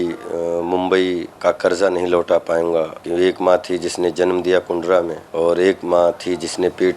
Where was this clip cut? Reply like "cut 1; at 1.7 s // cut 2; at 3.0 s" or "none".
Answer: cut 1; at 1.3 s // cut 2; at 3.0 s // cut 3; at 5.2 s